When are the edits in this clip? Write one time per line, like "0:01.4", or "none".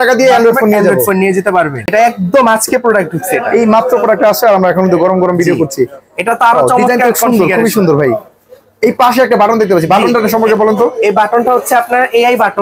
0:01.9